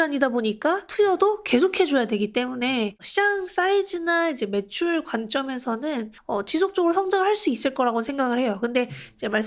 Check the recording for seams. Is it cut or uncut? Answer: uncut